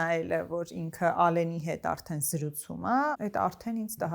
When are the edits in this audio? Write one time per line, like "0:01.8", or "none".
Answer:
0:03.2